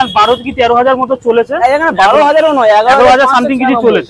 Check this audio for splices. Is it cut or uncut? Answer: uncut